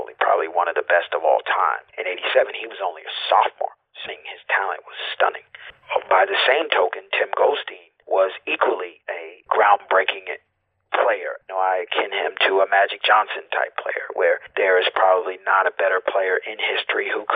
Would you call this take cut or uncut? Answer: cut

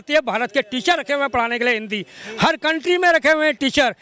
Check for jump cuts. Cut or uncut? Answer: uncut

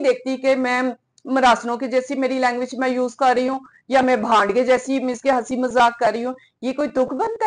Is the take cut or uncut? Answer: uncut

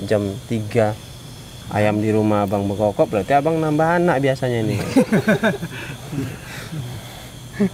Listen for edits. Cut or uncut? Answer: uncut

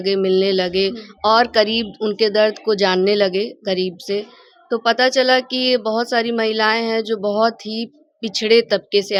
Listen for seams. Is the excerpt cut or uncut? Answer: uncut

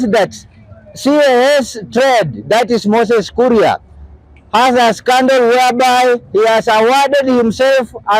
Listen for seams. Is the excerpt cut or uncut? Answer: uncut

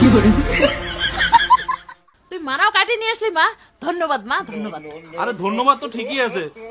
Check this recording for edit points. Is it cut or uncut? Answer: uncut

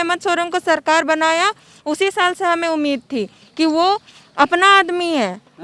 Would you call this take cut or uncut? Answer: uncut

